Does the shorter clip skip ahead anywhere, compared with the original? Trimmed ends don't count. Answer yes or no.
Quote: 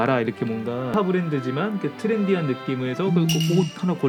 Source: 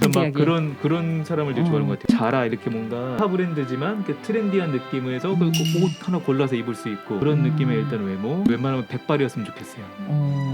no